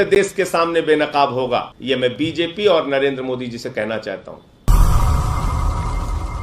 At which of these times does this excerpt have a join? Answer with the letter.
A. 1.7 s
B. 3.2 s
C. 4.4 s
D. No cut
A